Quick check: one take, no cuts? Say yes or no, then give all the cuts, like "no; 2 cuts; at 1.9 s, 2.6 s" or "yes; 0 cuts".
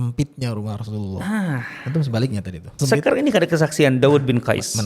no; 1 cut; at 2.7 s